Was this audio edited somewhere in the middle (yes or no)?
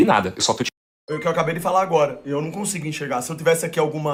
no